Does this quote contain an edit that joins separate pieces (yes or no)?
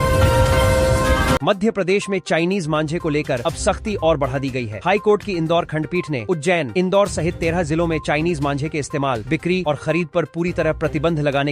yes